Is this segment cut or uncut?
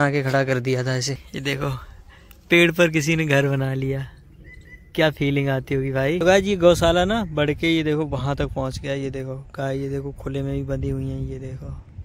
cut